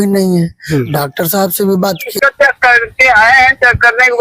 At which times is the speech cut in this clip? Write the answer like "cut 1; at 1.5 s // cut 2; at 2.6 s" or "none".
cut 1; at 0.9 s // cut 2; at 2.1 s